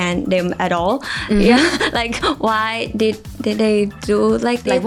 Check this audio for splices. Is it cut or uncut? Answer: uncut